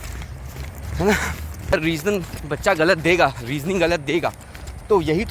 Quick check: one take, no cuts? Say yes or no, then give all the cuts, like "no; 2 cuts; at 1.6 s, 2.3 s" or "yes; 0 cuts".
no; 1 cut; at 1.7 s